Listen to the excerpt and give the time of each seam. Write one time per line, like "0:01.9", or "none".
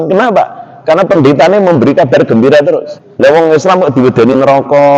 0:03.0